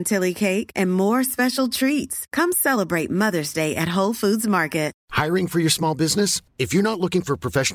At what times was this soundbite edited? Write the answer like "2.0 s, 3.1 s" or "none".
5.0 s